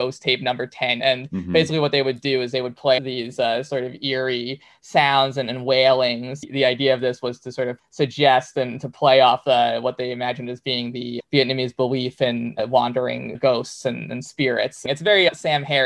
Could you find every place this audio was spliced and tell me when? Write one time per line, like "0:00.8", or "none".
0:01.0
0:03.0
0:06.4
0:14.8